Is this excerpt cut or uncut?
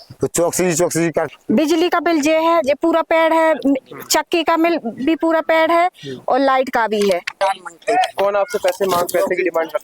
cut